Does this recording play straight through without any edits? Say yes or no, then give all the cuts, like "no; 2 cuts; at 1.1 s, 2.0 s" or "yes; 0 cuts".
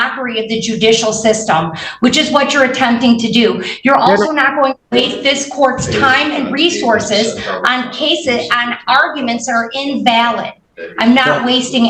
yes; 0 cuts